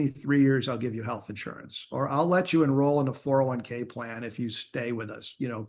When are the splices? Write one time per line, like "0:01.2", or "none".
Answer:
none

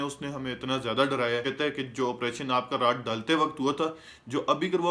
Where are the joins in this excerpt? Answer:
0:01.4

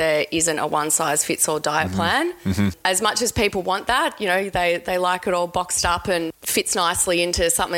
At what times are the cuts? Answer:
0:02.8
0:06.4

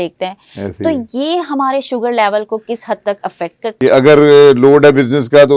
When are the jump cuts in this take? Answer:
0:03.6

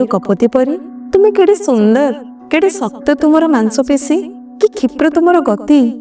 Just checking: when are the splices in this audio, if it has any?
0:00.9

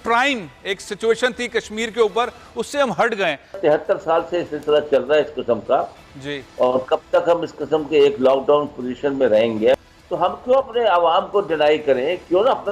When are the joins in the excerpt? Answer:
0:03.6
0:09.8

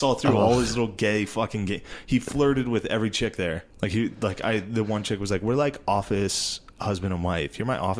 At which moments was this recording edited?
0:03.7

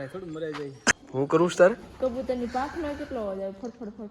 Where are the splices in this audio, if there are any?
0:00.9

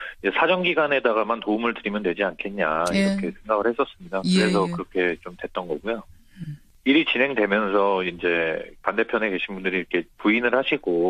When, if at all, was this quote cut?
none

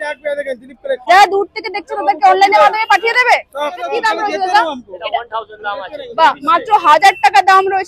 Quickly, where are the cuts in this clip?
0:01.0
0:03.9

